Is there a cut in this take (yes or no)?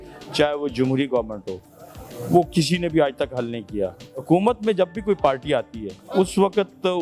yes